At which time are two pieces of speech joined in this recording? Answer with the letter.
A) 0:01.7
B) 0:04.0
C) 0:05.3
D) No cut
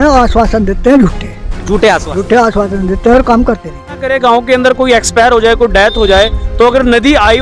B